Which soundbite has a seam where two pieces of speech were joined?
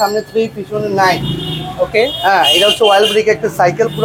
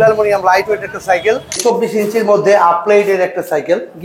second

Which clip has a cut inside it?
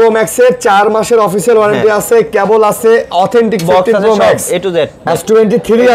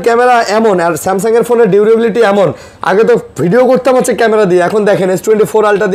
first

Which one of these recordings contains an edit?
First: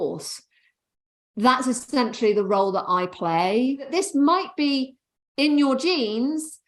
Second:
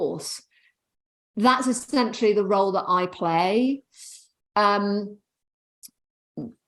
first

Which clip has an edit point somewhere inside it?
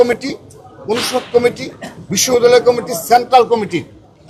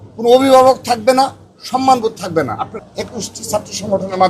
second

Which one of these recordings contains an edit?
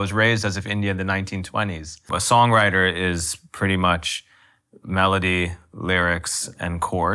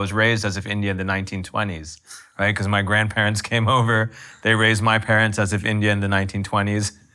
first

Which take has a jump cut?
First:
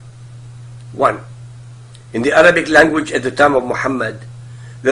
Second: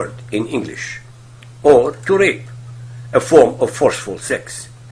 first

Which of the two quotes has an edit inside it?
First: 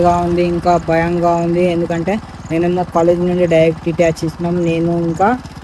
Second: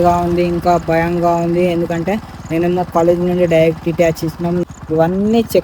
second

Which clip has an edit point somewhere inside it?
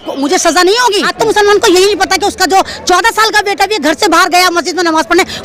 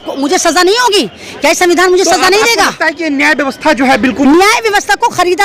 first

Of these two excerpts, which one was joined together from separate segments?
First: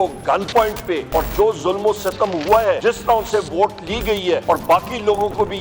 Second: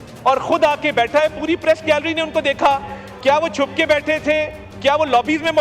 first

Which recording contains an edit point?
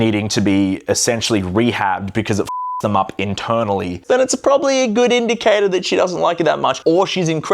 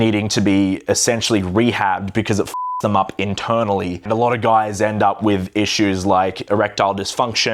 first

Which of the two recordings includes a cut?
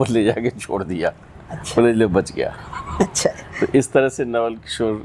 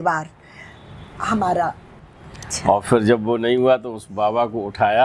second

